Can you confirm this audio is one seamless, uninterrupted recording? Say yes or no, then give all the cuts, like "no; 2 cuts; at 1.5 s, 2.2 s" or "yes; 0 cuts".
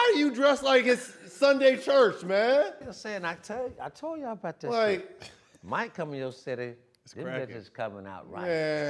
yes; 0 cuts